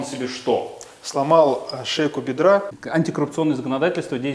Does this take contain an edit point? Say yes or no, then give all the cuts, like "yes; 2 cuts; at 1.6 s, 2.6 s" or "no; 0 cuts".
yes; 1 cut; at 2.8 s